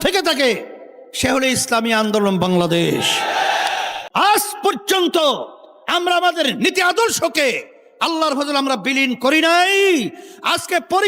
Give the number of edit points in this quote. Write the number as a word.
one